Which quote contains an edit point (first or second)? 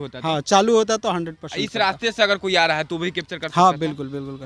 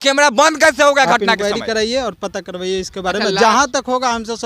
second